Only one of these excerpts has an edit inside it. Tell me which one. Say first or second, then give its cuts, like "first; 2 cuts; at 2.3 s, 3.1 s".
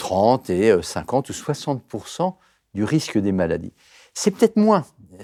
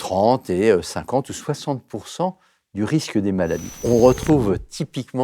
second; 1 cut; at 3.8 s